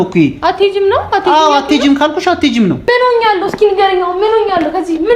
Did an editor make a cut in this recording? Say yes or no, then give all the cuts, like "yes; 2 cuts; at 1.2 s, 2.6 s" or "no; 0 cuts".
yes; 1 cut; at 2.8 s